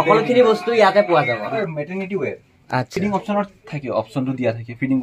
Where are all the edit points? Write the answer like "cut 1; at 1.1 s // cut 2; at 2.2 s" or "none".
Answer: cut 1; at 1.5 s // cut 2; at 2.9 s